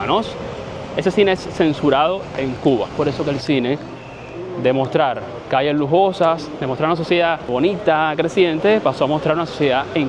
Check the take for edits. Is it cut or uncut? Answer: cut